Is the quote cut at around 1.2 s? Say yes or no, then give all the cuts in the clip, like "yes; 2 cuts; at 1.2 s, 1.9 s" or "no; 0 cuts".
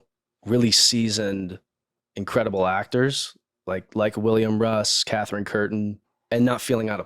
no; 1 cut; at 6.1 s